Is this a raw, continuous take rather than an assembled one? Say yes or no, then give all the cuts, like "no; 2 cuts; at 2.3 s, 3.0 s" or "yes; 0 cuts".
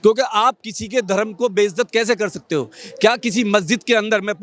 yes; 0 cuts